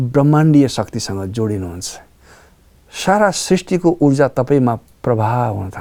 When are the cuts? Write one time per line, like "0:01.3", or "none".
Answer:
none

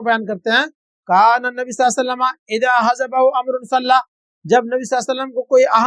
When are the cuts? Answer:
none

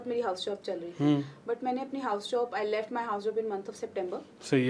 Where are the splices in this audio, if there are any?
none

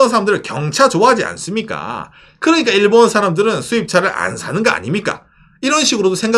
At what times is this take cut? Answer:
none

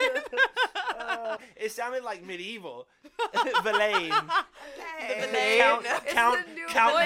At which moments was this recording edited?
0:01.4

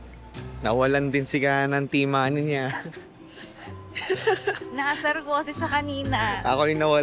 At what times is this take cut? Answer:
none

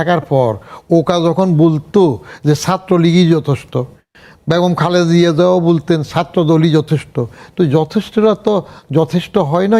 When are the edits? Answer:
none

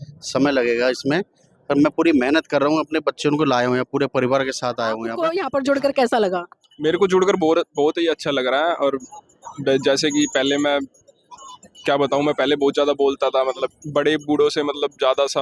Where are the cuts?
0:05.1
0:13.8

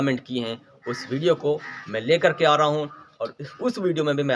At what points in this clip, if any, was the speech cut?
none

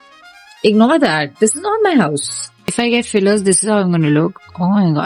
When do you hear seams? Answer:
0:02.7

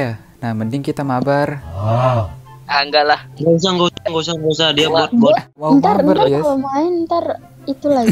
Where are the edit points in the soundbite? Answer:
0:05.6

